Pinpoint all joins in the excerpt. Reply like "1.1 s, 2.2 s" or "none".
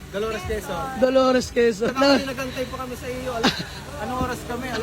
1.9 s